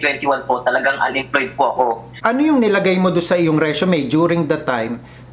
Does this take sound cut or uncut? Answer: cut